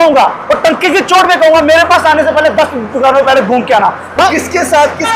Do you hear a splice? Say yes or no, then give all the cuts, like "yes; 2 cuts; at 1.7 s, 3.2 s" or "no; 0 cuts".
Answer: yes; 1 cut; at 4.2 s